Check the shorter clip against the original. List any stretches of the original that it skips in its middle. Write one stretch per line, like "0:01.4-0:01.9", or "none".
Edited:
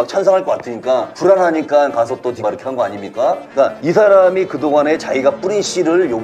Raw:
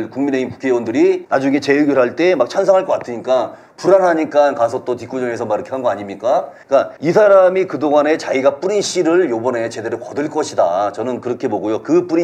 0:03.5-0:03.7
0:05.0-0:05.4
0:06.7-0:06.8